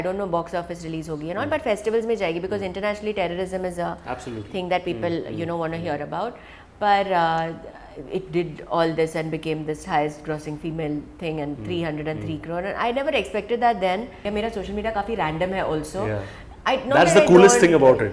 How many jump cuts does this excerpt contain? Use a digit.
1